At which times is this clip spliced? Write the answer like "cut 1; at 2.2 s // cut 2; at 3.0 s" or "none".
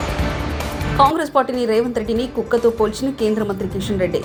none